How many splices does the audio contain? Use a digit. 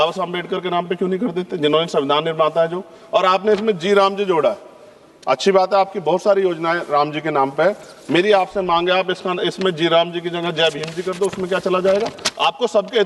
0